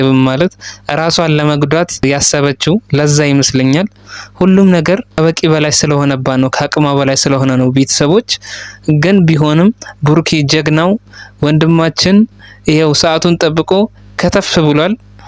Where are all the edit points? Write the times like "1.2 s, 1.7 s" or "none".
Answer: 2.0 s, 5.1 s